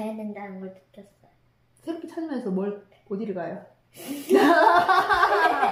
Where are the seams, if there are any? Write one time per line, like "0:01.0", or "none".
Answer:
none

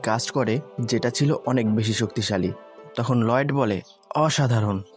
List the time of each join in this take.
0:02.8

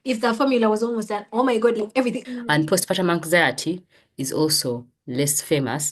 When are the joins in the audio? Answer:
0:02.3

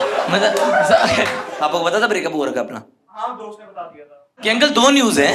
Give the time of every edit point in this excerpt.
0:01.5
0:04.3

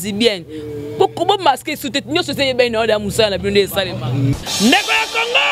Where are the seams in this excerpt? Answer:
0:04.3

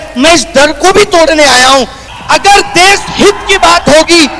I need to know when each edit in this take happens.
0:02.0

